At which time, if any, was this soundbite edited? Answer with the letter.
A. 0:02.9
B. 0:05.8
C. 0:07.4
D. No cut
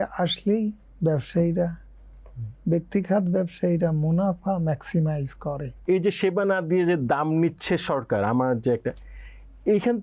B